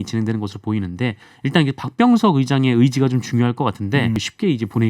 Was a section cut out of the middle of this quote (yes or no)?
yes